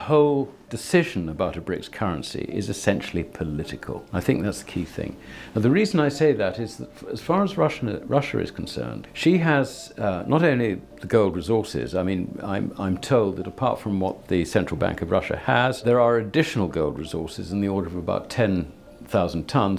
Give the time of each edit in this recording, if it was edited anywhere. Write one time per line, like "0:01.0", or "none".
0:04.0
0:09.0
0:15.8